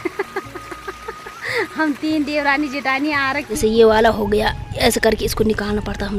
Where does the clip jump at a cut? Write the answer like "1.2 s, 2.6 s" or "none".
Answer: 3.4 s